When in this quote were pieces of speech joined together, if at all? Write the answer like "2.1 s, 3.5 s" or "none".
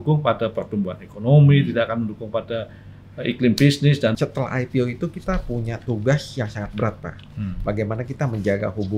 4.1 s